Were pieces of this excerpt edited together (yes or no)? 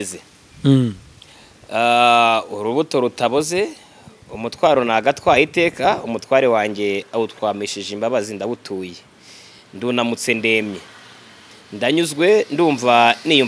no